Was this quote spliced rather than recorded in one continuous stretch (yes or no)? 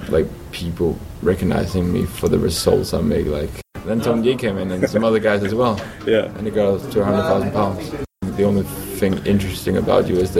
yes